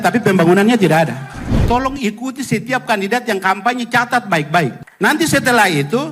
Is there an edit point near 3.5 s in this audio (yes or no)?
no